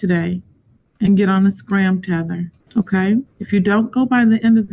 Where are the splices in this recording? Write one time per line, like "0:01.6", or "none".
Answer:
0:02.6
0:03.4